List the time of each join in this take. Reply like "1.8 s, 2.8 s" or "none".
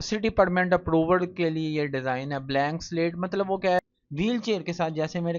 3.8 s